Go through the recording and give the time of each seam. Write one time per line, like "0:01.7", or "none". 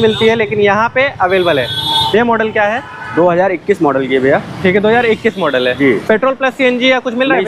none